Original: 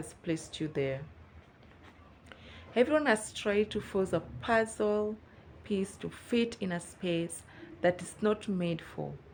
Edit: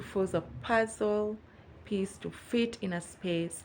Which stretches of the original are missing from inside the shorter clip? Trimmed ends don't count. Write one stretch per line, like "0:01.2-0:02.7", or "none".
none